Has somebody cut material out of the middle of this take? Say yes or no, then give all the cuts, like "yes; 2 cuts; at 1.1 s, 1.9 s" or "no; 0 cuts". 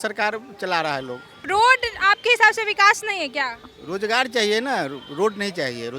no; 0 cuts